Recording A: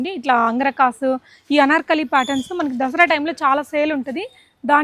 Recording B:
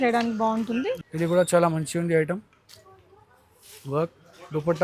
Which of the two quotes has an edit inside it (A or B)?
B